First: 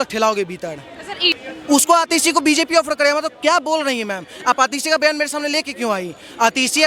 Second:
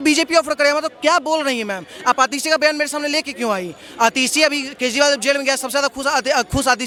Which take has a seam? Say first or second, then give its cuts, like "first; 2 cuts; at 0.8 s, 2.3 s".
first; 1 cut; at 1.3 s